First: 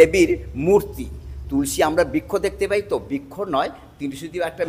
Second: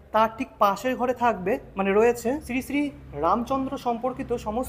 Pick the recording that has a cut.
second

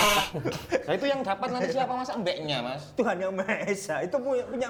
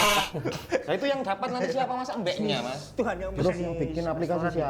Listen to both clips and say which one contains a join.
second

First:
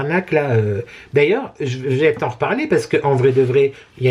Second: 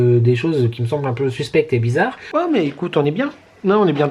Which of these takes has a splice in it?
second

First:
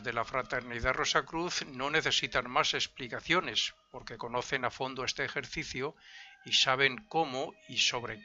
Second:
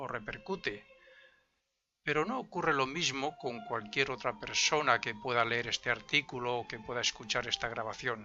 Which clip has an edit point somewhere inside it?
first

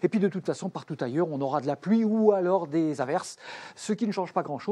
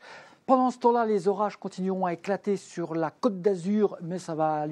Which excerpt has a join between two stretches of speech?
first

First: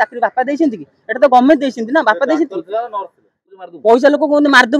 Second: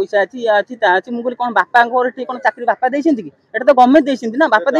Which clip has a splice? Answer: first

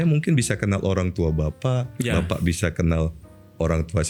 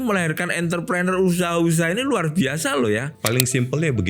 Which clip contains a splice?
second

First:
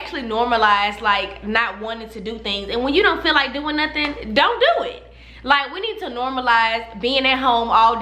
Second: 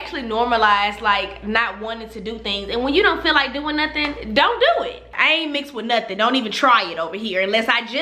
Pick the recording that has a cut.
second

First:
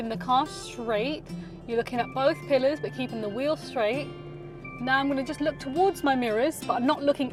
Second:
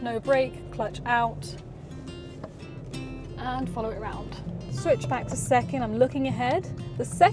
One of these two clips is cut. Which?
second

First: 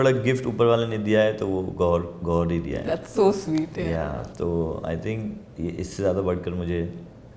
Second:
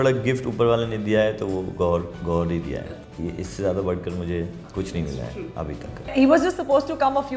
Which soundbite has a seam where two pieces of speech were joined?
second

